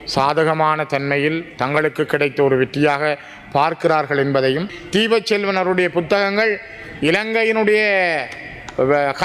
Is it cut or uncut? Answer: cut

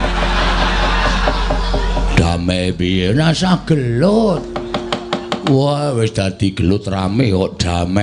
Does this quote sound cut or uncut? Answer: uncut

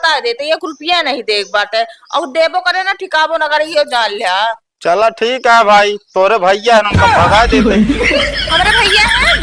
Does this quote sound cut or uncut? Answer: uncut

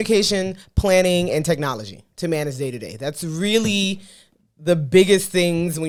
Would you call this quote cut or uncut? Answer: uncut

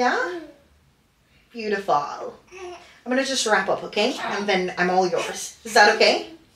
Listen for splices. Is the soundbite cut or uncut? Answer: uncut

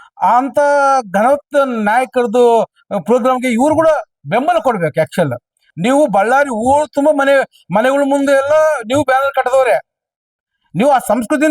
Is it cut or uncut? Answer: cut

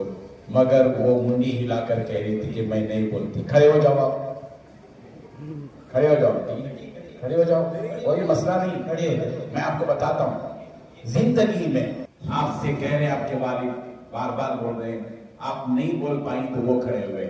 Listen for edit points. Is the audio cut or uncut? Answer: uncut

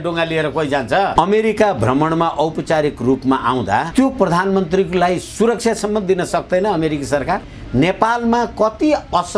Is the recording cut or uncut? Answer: cut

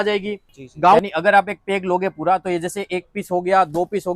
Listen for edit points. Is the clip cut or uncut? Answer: cut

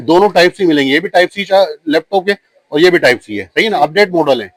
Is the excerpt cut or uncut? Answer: uncut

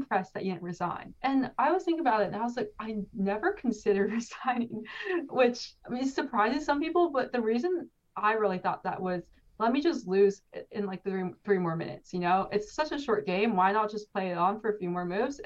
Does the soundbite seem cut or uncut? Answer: uncut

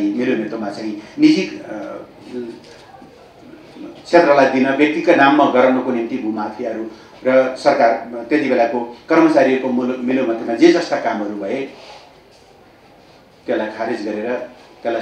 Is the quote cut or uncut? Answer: uncut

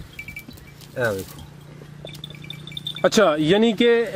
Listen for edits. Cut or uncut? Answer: uncut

